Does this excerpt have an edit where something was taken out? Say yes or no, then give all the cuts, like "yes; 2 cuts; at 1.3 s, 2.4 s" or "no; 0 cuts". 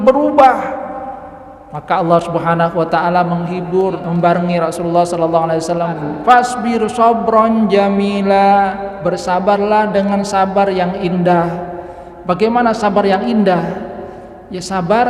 yes; 2 cuts; at 4.0 s, 6.0 s